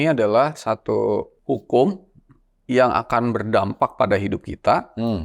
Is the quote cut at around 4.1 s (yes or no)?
no